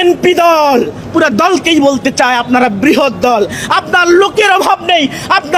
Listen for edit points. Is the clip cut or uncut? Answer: uncut